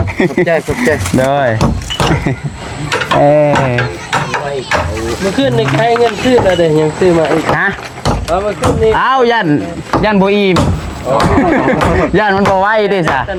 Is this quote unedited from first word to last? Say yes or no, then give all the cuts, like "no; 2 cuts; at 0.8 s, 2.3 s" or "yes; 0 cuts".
yes; 0 cuts